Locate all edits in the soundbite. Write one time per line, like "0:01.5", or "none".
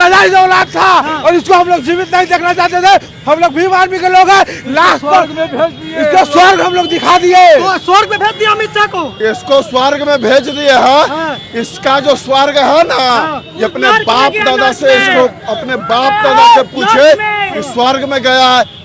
none